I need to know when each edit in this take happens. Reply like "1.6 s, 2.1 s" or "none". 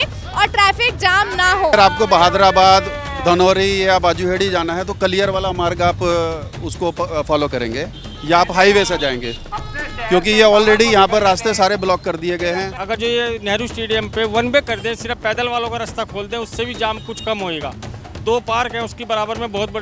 1.7 s, 12.7 s